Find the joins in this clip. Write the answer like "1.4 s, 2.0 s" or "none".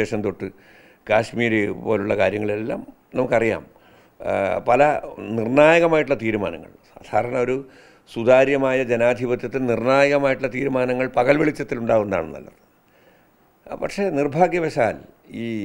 none